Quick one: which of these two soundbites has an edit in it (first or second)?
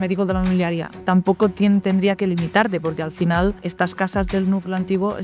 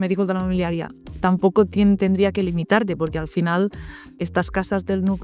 first